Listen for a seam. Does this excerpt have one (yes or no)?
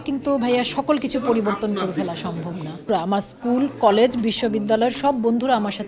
yes